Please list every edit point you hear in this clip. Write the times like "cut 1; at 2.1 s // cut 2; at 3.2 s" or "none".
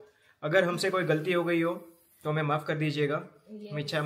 none